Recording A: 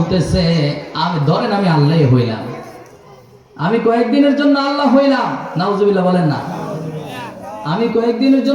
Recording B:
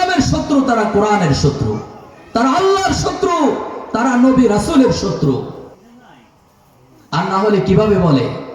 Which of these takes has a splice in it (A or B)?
B